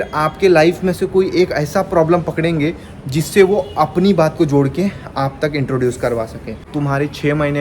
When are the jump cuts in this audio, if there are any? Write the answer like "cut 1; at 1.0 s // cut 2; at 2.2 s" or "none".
cut 1; at 6.5 s